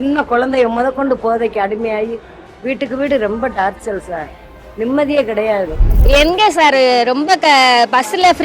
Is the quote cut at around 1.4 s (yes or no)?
no